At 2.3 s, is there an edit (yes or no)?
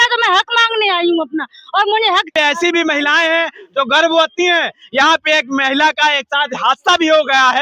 yes